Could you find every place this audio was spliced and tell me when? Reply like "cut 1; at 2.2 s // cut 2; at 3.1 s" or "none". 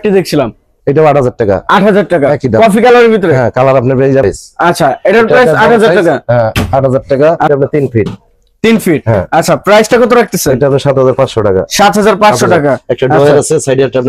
cut 1; at 4.2 s // cut 2; at 7.5 s